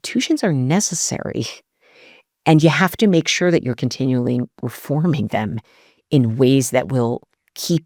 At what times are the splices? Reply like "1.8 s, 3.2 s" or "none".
none